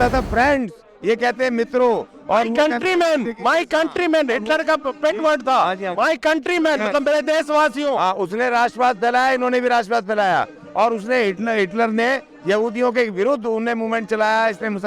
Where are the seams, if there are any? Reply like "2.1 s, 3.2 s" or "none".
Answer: none